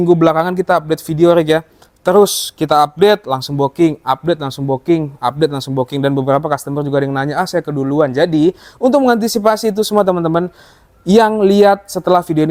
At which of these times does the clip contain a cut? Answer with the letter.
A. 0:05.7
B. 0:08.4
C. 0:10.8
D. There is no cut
D